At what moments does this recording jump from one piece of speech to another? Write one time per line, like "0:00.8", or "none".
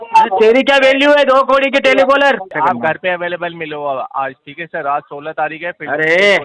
0:02.5